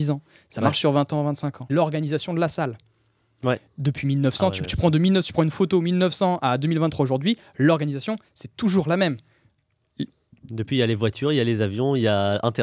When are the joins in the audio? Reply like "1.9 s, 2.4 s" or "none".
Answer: 1.7 s